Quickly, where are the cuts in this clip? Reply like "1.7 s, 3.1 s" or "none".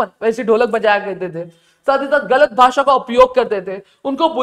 none

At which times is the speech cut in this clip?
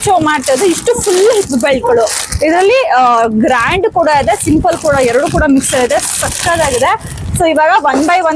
none

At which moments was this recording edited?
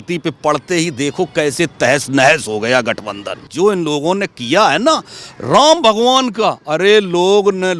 3.5 s

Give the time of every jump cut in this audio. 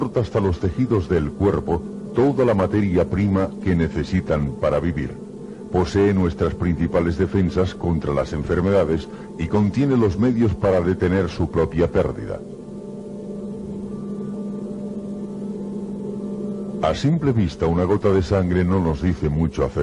18.6 s

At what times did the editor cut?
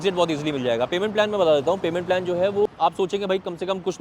2.7 s

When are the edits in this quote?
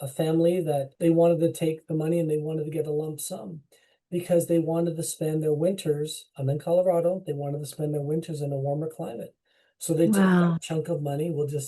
0.9 s

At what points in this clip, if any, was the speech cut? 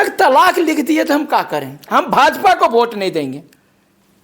1.8 s

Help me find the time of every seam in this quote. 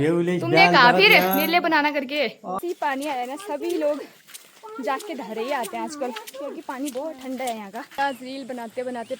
2.6 s, 8.0 s

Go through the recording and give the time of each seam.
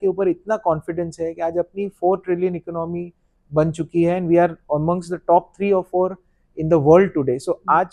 none

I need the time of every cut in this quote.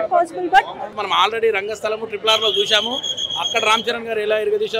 0.9 s

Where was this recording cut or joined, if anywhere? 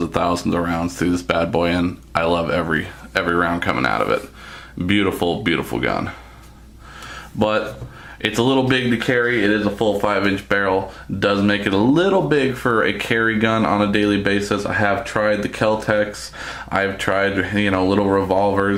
none

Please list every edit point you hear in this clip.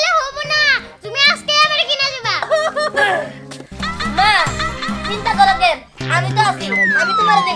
2.5 s

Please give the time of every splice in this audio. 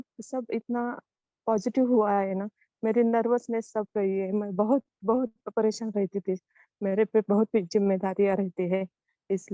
none

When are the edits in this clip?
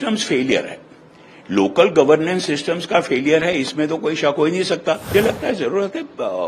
5.1 s

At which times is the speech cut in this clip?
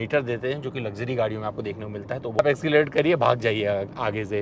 2.4 s

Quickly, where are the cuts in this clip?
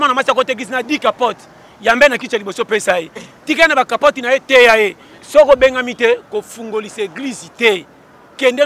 5.1 s

